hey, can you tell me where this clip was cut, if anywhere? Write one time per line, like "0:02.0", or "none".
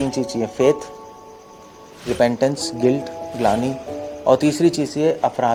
none